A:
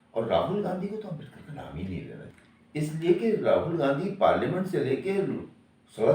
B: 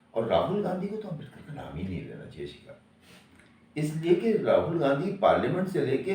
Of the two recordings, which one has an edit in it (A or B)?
A